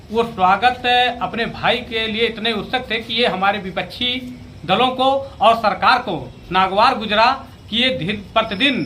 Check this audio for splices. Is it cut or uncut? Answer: uncut